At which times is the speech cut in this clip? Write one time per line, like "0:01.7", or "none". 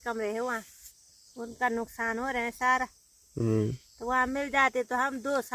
none